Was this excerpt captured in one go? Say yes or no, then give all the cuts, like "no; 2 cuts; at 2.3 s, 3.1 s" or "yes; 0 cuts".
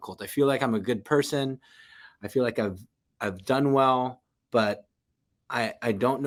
yes; 0 cuts